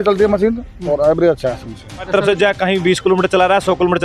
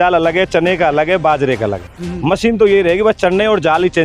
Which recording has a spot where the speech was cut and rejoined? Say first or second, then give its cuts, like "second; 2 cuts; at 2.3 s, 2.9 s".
first; 1 cut; at 2.1 s